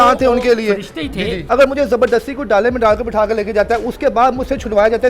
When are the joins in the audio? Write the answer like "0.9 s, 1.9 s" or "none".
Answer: 1.4 s